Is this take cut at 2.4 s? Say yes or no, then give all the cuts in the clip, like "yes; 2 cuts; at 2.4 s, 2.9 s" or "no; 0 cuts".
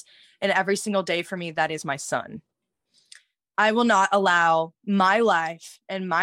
no; 0 cuts